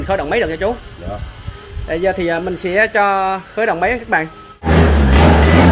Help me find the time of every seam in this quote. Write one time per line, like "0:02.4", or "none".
0:04.7